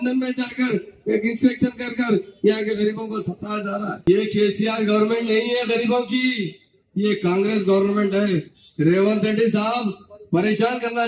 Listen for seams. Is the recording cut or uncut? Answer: cut